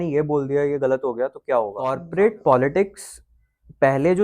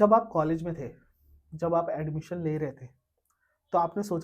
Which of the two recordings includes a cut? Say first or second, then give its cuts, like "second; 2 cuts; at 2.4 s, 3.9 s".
first; 1 cut; at 2.0 s